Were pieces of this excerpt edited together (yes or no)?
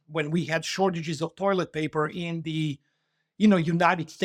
no